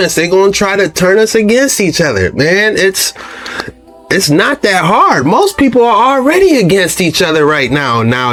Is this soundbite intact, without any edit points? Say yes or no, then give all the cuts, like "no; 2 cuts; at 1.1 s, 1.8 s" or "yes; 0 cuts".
yes; 0 cuts